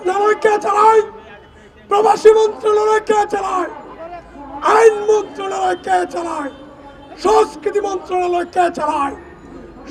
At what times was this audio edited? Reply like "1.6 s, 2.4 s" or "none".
none